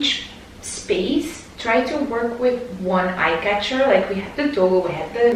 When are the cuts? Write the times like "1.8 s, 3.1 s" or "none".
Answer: none

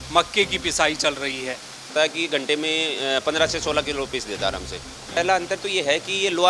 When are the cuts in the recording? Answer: 1.9 s, 5.2 s

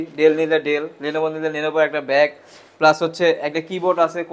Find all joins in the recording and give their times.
none

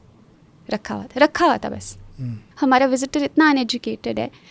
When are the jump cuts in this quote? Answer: 2.4 s

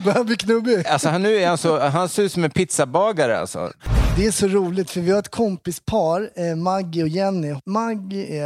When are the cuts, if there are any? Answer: 3.8 s, 7.5 s

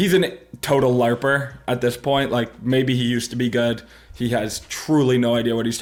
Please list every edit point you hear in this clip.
none

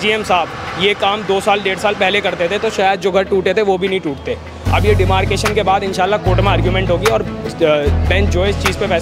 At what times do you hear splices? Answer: none

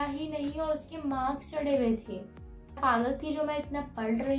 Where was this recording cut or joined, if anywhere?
2.8 s

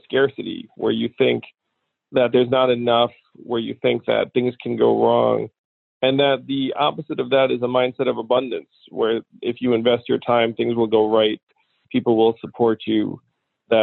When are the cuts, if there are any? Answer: none

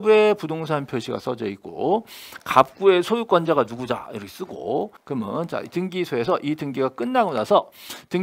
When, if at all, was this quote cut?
5.0 s

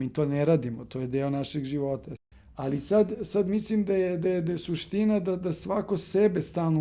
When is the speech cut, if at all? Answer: 2.1 s

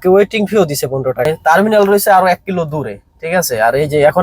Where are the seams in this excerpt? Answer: 1.3 s

